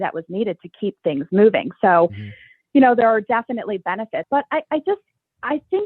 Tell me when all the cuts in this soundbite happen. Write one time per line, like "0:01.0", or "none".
0:04.2